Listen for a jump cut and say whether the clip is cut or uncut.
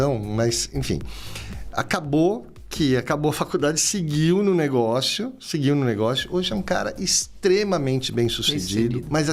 uncut